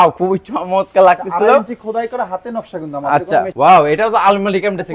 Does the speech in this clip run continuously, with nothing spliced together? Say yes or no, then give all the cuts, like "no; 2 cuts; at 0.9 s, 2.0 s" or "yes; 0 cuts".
no; 1 cut; at 3.5 s